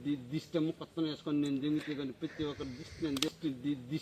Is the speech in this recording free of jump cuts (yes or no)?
yes